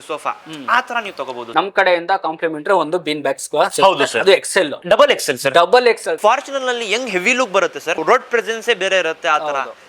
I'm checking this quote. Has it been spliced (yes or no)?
yes